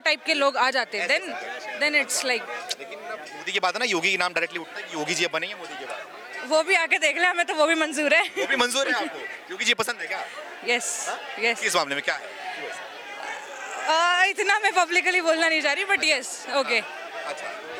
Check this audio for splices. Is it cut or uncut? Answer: uncut